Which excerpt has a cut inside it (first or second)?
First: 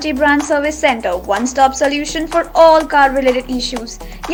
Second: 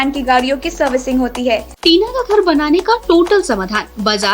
second